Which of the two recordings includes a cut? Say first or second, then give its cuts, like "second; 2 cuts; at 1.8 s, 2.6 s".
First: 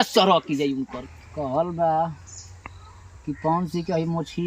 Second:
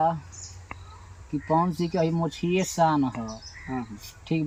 first; 1 cut; at 1.0 s